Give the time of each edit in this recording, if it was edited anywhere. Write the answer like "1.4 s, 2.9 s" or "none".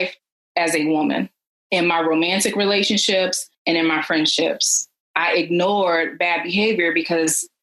none